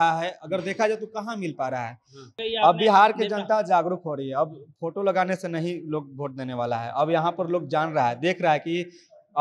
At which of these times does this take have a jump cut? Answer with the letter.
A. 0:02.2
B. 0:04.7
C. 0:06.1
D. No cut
A